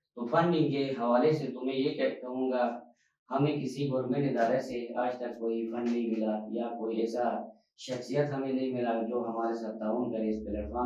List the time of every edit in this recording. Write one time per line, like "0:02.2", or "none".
none